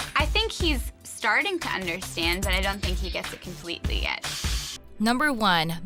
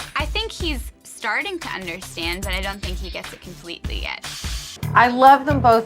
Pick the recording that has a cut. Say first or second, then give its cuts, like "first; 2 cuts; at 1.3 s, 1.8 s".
second; 1 cut; at 4.7 s